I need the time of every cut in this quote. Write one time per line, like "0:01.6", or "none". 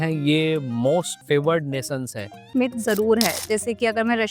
0:01.2
0:02.5